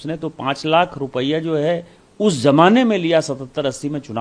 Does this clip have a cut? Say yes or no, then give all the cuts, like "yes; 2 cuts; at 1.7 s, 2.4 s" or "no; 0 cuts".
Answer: no; 0 cuts